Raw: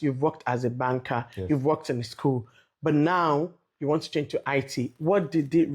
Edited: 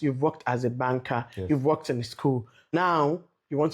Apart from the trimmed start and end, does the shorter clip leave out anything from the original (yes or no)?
yes